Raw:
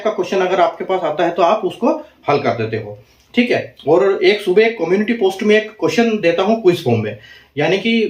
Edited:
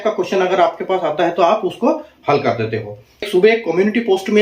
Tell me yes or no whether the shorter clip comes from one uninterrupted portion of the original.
no